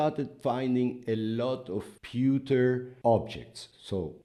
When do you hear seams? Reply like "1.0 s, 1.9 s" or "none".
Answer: none